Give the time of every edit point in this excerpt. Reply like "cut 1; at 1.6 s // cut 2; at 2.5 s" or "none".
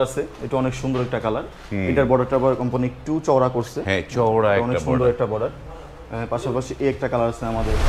none